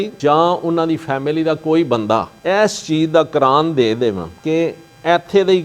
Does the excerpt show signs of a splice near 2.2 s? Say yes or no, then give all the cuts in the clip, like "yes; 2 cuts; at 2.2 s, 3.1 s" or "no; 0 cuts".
no; 0 cuts